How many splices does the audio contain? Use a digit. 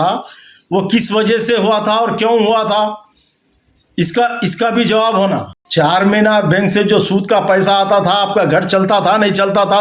1